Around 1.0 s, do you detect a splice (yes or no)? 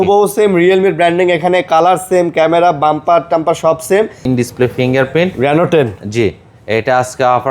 no